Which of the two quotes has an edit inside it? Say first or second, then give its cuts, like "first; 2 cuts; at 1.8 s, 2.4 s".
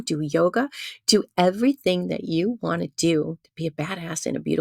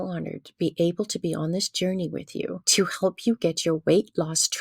second; 1 cut; at 2.6 s